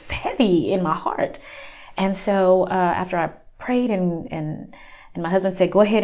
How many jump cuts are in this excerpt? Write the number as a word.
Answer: zero